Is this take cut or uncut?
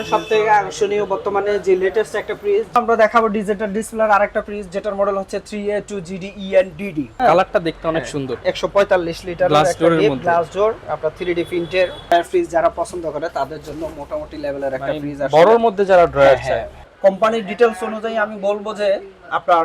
cut